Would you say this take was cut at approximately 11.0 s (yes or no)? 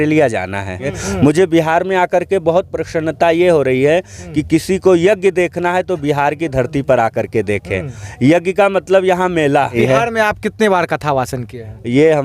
no